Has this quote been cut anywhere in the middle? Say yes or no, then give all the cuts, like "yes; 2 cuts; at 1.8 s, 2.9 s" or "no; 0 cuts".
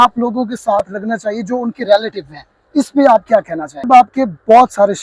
yes; 1 cut; at 3.9 s